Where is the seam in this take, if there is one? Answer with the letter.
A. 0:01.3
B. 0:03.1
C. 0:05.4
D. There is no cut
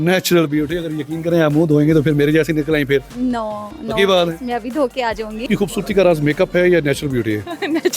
C